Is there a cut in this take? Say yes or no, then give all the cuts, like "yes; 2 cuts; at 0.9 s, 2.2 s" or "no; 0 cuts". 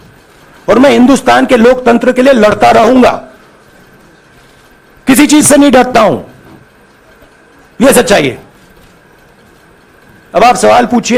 no; 0 cuts